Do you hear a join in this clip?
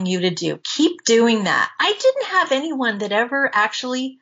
no; 0 cuts

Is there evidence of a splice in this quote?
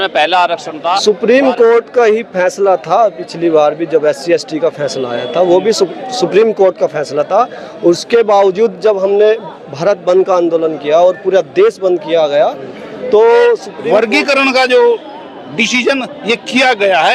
yes; 2 cuts; at 1.0 s, 13.7 s

